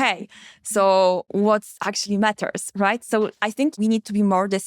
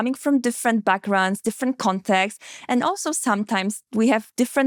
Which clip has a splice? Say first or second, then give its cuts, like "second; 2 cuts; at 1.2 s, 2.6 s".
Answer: first; 2 cuts; at 1.3 s, 3.8 s